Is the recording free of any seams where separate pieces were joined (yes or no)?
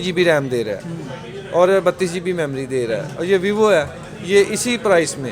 yes